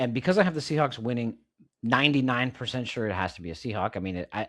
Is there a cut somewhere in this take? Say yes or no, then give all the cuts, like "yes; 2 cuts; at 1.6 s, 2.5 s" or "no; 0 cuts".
no; 0 cuts